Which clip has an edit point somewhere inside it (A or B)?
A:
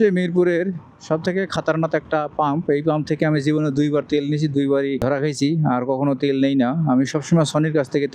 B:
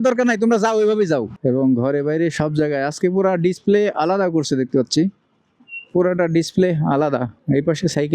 B